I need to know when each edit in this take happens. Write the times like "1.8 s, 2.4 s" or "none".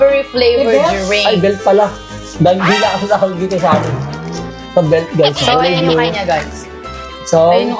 none